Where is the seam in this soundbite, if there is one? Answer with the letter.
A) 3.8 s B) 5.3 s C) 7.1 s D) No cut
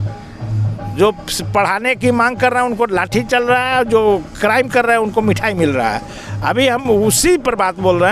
D